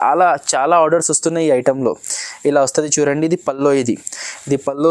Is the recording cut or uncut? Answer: uncut